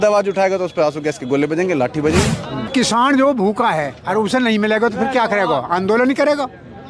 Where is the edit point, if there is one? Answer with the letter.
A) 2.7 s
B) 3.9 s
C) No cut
A